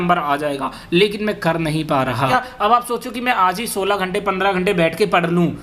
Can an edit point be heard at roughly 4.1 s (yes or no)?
no